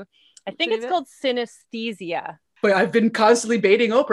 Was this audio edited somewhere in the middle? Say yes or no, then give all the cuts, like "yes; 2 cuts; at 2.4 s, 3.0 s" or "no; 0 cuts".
yes; 1 cut; at 2.4 s